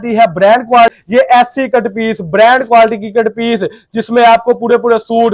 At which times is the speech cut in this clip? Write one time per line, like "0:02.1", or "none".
0:01.0